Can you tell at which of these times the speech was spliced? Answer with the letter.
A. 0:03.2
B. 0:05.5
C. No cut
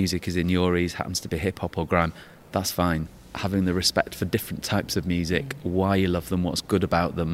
A